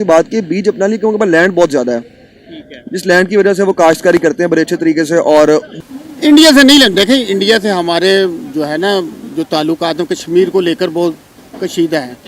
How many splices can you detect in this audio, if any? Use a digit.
1